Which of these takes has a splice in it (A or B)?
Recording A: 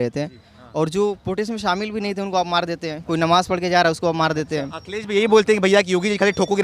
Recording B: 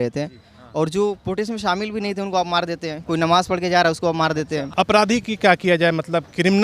B